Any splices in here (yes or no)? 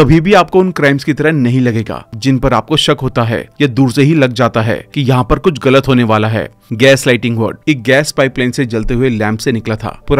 yes